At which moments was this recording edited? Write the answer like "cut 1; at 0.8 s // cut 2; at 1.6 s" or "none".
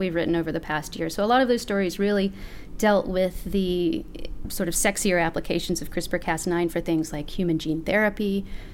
none